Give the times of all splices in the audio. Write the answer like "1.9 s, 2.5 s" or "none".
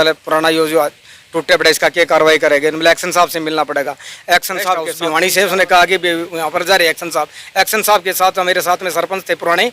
4.9 s

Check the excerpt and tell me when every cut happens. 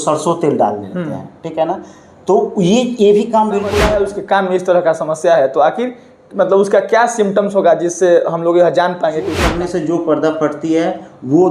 3.8 s, 9.4 s

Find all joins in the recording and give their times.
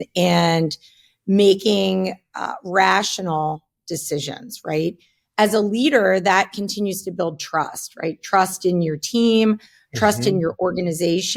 none

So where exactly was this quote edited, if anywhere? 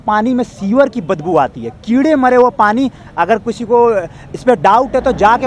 none

